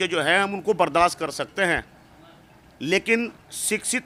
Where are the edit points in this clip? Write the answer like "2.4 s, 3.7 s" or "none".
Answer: none